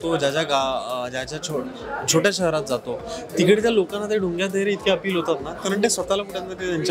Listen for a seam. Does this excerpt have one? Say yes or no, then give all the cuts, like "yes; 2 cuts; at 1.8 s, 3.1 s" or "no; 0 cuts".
no; 0 cuts